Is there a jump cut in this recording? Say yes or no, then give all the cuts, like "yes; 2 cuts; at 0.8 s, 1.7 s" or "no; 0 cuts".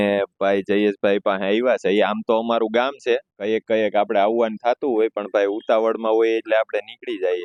no; 0 cuts